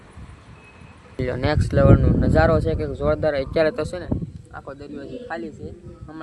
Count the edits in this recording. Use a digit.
1